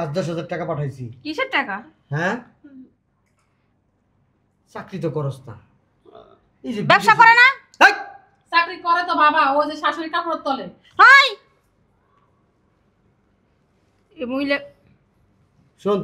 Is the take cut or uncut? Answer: uncut